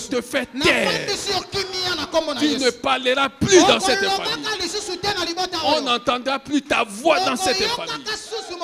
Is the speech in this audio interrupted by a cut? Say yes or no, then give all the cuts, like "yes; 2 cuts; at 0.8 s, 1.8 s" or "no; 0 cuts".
no; 0 cuts